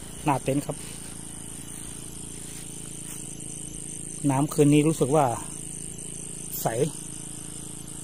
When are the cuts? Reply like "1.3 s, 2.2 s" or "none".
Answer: none